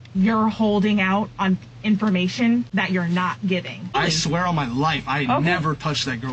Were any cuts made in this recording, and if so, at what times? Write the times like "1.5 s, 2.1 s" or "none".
2.7 s, 3.9 s